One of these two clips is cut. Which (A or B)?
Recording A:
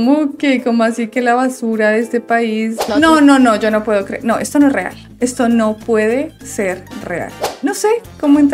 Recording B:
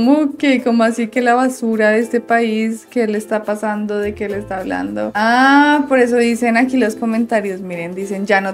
A